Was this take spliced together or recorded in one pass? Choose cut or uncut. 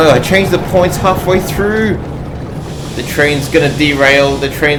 uncut